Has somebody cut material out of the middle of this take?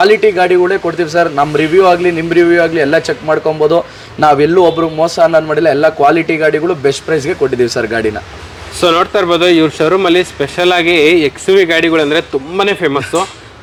no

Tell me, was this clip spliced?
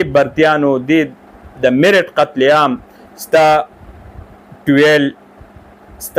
no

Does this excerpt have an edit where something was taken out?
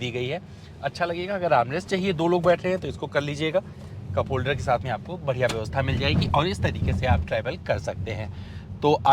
no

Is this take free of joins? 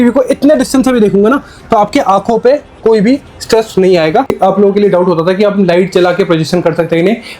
no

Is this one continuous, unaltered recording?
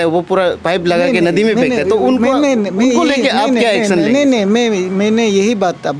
yes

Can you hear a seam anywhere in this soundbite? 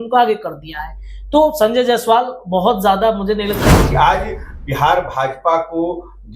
yes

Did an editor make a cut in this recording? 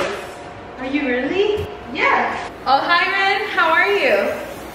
yes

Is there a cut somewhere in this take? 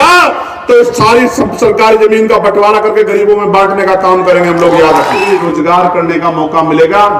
yes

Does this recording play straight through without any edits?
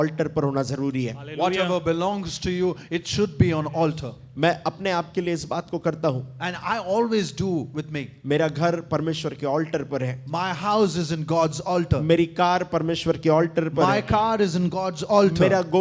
yes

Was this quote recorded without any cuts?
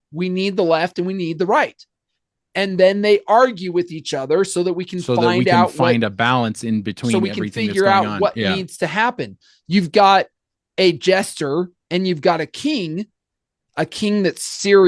yes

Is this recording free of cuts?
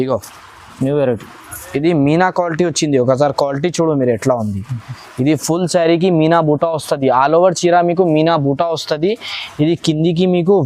yes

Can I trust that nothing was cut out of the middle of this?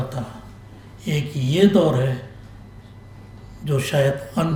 yes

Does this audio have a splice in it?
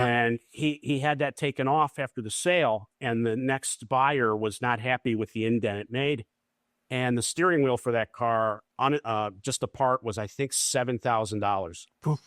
yes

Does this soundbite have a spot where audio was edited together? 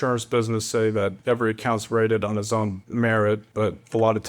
yes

